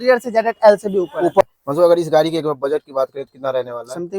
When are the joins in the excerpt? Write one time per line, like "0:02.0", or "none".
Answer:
0:01.4